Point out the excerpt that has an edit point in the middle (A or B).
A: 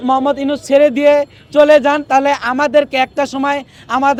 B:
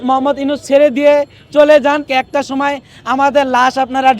B